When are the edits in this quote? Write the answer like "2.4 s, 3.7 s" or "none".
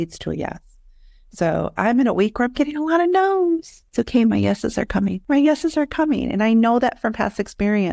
3.8 s, 5.2 s